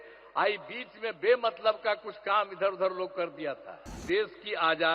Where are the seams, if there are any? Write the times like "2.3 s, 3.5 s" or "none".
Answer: 4.0 s